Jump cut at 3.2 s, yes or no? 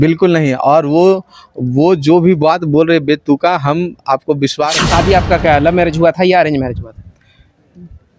no